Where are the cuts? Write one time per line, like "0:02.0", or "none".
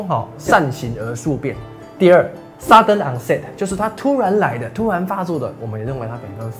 none